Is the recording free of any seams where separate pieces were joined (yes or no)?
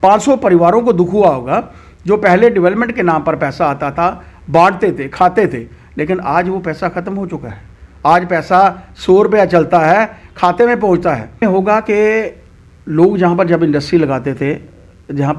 no